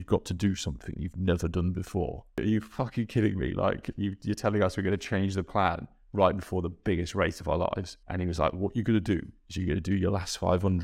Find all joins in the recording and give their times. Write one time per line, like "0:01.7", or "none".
0:02.4
0:08.0